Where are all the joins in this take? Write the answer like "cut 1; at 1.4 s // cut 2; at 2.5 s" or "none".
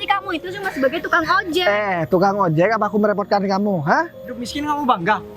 cut 1; at 4.2 s